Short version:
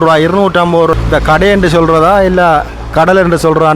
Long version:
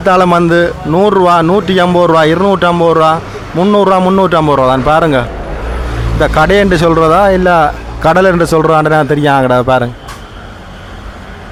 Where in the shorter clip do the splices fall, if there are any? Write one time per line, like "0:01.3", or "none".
0:00.9

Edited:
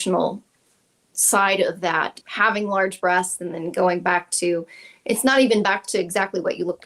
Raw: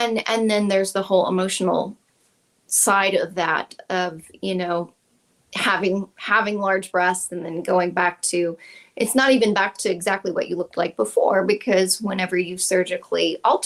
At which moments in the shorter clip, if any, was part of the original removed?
0:02.2

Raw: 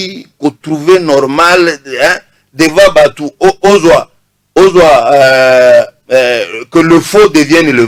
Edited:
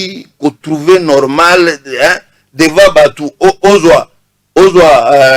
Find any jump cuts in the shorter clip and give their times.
none

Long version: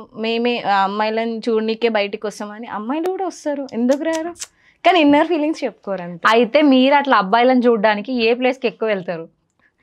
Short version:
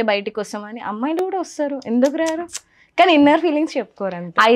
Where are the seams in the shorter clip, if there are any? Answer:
none

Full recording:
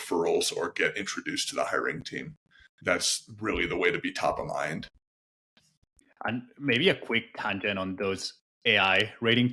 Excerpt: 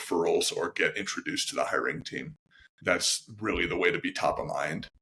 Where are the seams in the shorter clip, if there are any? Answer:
none

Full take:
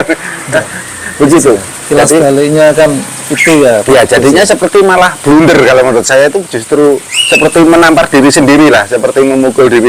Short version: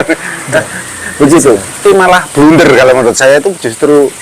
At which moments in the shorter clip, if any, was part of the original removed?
0:01.8

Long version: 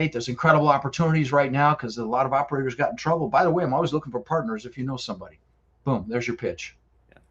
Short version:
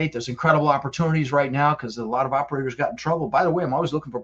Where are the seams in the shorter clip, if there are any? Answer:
none

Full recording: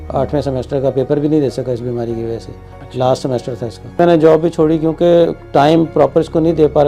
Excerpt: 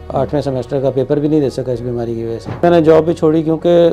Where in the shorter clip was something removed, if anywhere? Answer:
0:02.5

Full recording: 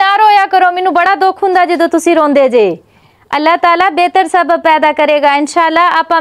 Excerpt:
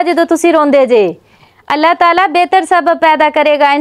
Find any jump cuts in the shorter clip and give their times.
none

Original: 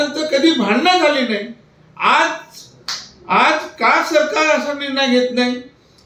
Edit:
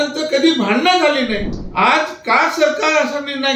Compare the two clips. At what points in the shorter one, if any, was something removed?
0:01.6

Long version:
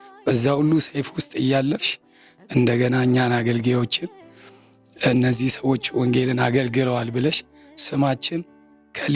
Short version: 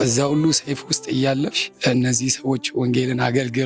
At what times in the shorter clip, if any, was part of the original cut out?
0:01.7

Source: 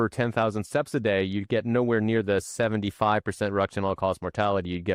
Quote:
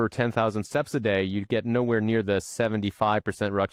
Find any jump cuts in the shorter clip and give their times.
none

